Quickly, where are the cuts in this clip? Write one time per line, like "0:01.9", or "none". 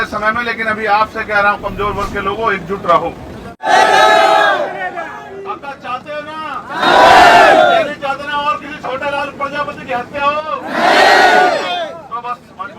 0:03.7